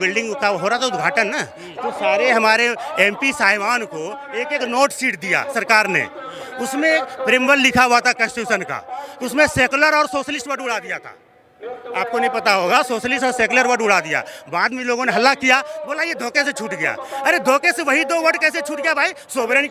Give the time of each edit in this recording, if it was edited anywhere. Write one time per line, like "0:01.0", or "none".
none